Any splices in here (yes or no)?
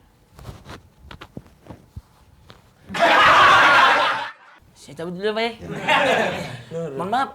yes